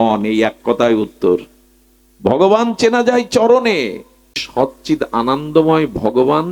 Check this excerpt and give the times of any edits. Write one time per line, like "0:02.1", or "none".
0:04.4